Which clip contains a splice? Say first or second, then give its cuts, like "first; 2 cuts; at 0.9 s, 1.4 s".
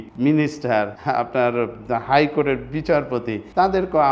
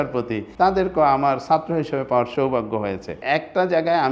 second; 1 cut; at 3.2 s